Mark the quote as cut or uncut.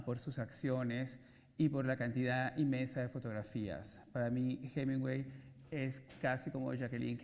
cut